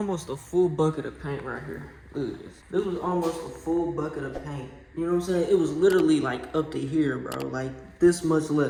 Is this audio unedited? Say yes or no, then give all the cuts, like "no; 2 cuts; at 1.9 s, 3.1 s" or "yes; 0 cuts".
yes; 0 cuts